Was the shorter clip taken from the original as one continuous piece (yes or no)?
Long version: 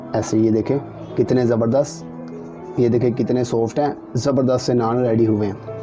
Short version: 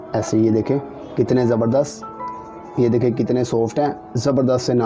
yes